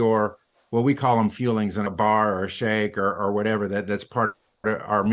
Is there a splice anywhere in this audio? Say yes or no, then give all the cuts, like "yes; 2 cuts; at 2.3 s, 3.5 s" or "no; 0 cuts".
yes; 1 cut; at 1.9 s